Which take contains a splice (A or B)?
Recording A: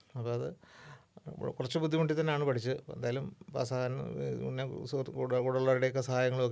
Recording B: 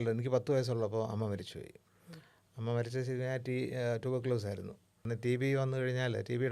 B